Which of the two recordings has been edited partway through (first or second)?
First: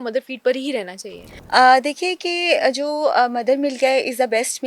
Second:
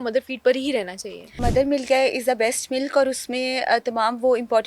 second